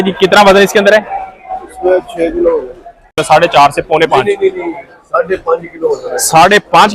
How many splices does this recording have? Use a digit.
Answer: 1